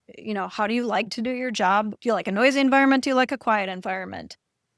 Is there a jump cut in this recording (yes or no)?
yes